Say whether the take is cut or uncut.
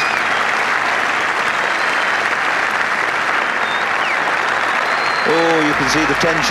cut